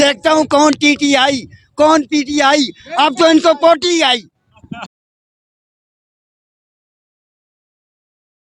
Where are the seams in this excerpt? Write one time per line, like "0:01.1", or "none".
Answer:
none